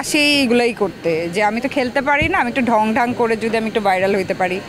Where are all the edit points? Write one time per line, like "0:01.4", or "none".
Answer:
none